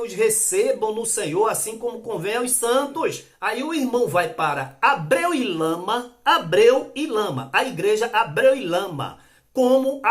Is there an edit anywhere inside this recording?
yes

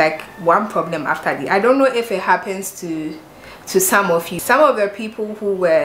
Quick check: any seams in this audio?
yes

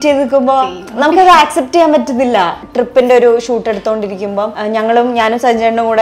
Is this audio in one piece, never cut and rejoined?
no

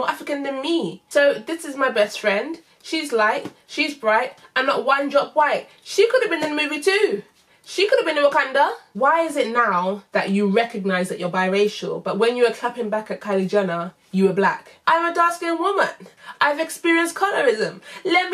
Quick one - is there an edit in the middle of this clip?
yes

